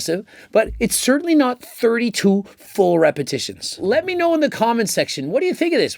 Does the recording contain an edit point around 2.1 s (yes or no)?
no